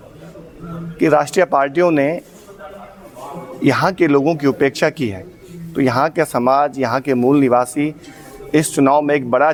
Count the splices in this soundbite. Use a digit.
0